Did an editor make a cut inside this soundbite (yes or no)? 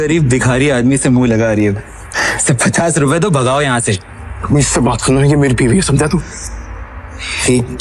no